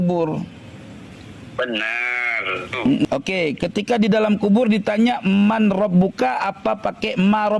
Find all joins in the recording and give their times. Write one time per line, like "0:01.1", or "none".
0:03.0